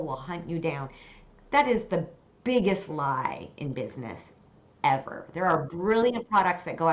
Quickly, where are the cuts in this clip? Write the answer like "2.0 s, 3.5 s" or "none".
none